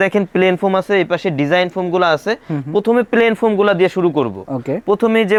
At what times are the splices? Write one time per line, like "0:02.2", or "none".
none